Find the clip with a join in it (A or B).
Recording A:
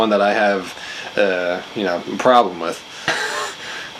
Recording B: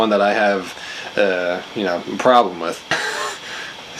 B